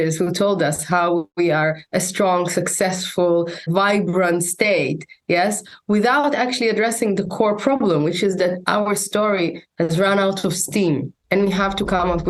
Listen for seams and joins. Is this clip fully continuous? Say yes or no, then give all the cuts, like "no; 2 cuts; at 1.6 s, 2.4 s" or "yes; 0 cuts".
no; 1 cut; at 3.7 s